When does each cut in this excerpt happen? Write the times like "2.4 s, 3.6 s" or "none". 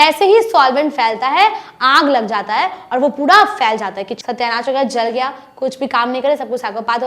4.2 s